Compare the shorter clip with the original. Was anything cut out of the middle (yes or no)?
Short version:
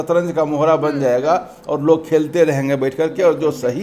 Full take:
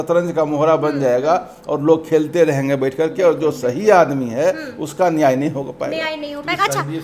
no